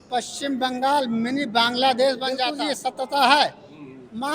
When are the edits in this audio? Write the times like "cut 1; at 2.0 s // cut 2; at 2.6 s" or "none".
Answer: cut 1; at 2.5 s